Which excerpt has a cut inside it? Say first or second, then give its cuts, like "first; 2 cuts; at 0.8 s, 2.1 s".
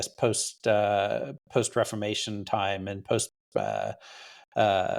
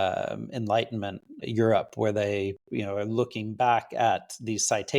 second; 1 cut; at 1.3 s